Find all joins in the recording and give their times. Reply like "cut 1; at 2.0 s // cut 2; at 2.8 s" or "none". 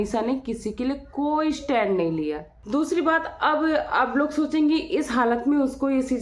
cut 1; at 2.5 s